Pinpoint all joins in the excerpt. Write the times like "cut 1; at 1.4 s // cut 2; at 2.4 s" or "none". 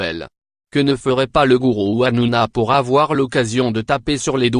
none